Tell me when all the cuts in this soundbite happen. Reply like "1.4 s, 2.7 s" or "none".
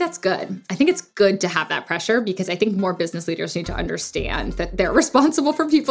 4.7 s